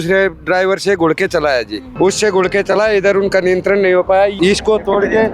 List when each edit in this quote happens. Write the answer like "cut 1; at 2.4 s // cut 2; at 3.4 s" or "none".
cut 1; at 1.8 s // cut 2; at 4.3 s

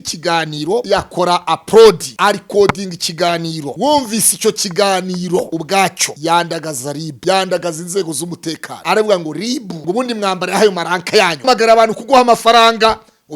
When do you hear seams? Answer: cut 1; at 0.8 s // cut 2; at 2.1 s // cut 3; at 3.6 s // cut 4; at 5.6 s // cut 5; at 7.1 s // cut 6; at 8.7 s // cut 7; at 9.7 s // cut 8; at 11.4 s

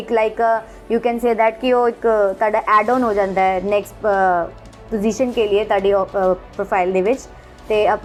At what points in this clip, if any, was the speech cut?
none

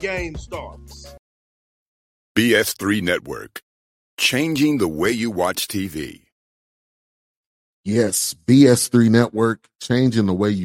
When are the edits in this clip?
cut 1; at 1.1 s

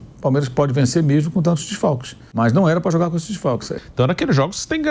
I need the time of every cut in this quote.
cut 1; at 2.2 s // cut 2; at 3.7 s

